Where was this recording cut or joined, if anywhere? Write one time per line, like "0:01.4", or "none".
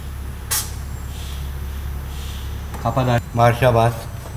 0:03.3